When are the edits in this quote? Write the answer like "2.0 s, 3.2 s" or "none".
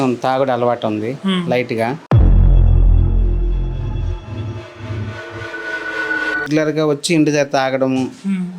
6.5 s